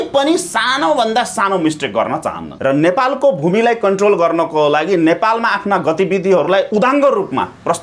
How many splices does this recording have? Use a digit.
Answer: 2